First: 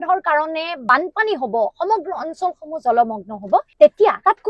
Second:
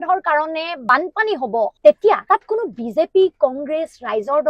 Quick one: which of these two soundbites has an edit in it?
second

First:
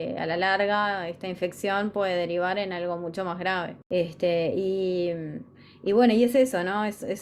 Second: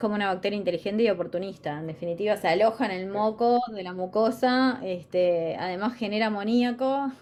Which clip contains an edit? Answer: first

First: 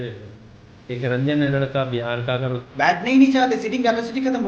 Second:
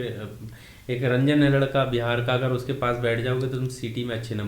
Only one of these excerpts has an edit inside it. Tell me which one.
first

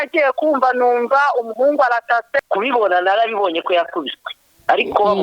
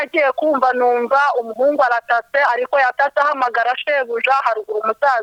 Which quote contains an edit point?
first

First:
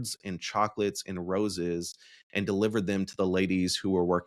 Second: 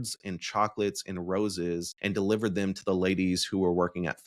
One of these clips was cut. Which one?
second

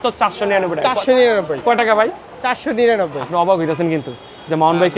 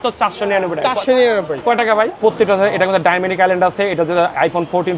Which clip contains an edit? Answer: second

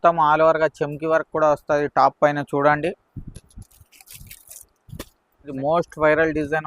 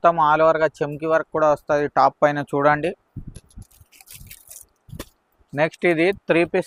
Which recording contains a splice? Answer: first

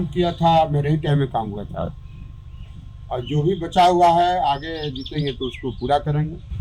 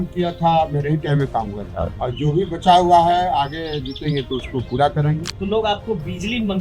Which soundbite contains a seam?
second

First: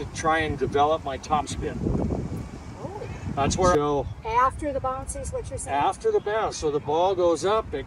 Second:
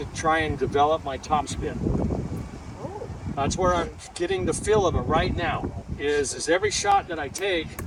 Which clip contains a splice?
first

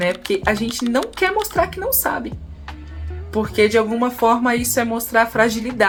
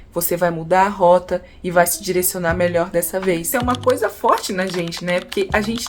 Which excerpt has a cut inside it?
second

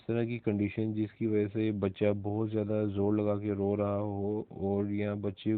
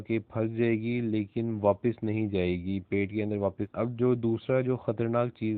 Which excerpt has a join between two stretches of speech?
second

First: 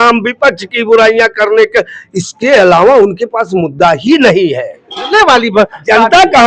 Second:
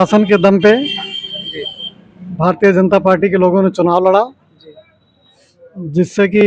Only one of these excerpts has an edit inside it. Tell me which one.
first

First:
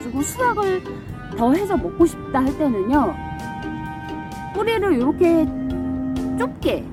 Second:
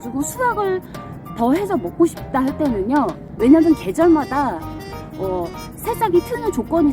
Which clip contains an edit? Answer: second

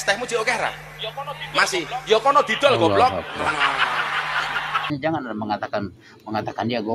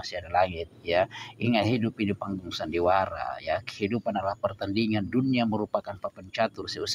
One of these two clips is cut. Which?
first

